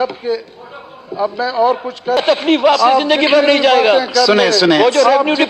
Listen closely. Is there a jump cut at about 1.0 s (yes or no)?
no